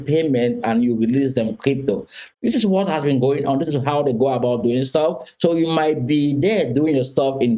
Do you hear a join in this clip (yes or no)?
no